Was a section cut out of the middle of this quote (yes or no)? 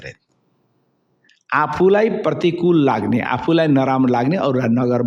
no